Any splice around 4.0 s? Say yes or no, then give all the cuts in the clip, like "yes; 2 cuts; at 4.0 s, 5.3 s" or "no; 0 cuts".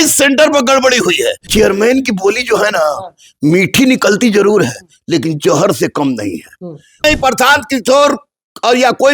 no; 2 cuts; at 1.4 s, 7.0 s